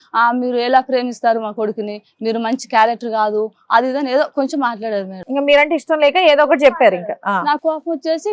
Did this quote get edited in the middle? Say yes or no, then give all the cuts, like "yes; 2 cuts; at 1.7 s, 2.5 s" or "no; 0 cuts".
no; 0 cuts